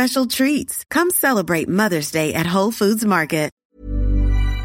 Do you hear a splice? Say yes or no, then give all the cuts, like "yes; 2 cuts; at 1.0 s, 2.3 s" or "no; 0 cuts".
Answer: yes; 1 cut; at 3.6 s